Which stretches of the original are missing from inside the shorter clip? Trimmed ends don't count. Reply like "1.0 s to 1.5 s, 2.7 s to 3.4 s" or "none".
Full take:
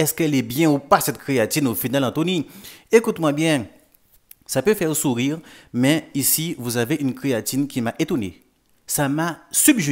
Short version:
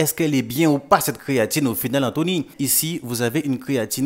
2.5 s to 6.1 s